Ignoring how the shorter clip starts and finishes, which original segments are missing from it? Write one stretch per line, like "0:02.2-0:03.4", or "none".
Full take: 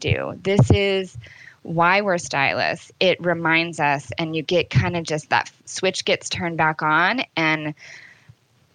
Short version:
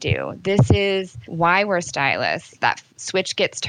0:01.2-0:01.6
0:02.9-0:05.2